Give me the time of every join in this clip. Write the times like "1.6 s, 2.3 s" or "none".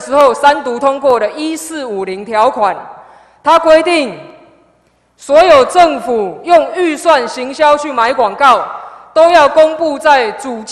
none